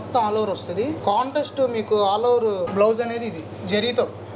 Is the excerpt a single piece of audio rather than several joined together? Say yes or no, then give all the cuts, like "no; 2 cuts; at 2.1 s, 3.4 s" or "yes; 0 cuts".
no; 2 cuts; at 1.0 s, 2.7 s